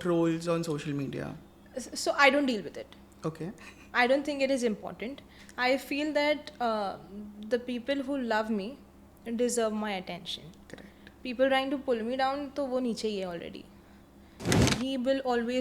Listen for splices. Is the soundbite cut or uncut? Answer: cut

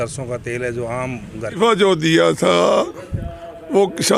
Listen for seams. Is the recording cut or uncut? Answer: cut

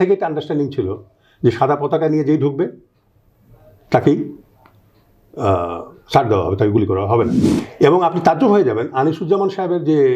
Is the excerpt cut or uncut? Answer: cut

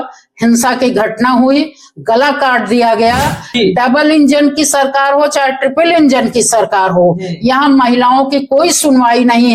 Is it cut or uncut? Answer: cut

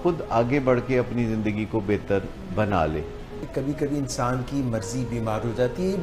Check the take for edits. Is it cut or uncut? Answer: uncut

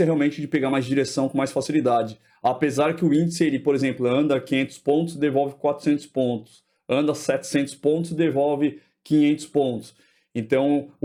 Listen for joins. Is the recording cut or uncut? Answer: uncut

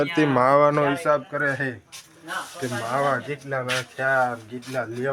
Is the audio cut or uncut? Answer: uncut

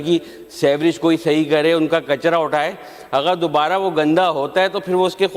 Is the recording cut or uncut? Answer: uncut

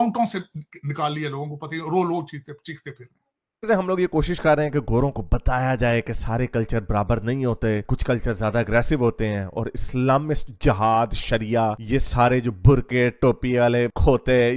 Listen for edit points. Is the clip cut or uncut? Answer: cut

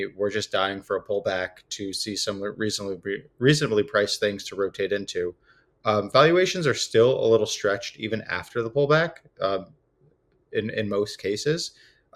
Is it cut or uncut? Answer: uncut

